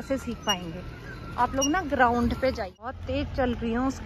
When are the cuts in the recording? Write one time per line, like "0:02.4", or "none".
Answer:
0:02.9